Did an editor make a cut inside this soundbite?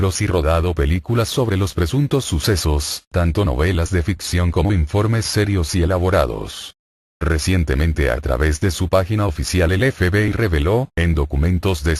yes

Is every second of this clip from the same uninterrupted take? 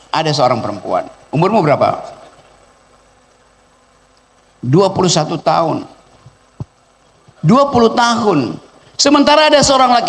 yes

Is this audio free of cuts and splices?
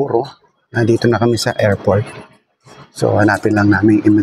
yes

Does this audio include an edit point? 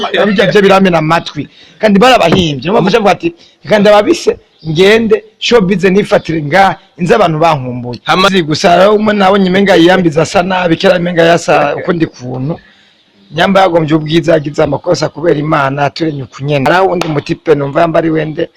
yes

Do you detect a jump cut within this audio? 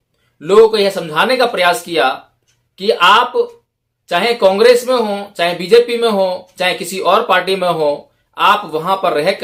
no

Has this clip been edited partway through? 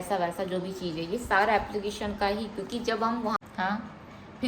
yes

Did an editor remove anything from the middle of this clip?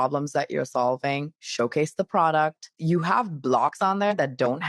yes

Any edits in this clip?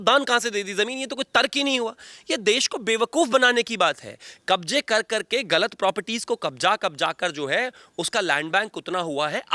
no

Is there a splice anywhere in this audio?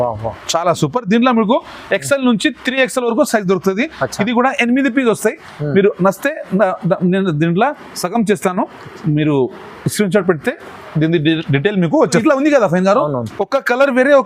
yes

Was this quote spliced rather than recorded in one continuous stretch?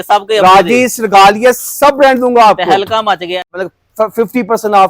yes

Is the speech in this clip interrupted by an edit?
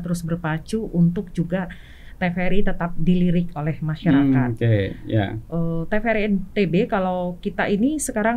no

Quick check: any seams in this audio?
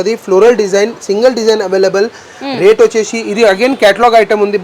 no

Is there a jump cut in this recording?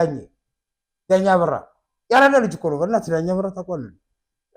no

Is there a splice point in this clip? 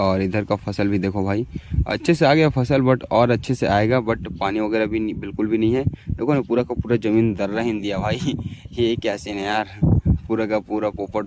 no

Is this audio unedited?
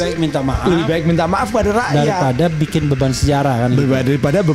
yes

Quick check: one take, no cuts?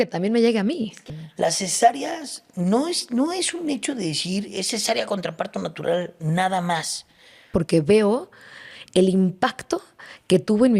no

